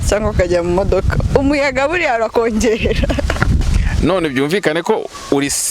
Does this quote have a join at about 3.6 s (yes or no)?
yes